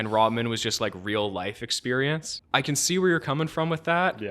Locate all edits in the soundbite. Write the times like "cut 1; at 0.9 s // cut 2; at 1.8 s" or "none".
cut 1; at 2.3 s